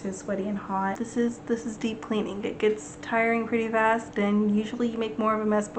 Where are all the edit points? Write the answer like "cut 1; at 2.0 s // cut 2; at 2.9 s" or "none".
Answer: cut 1; at 1.0 s